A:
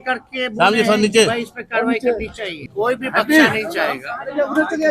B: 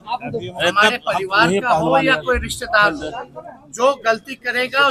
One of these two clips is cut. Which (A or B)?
A